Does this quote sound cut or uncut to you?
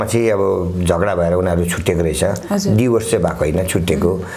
uncut